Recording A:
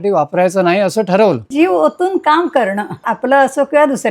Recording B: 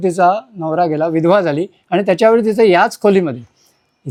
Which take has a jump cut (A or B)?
A